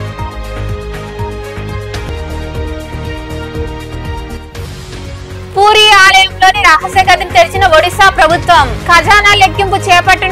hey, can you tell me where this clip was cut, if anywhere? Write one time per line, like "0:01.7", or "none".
0:02.0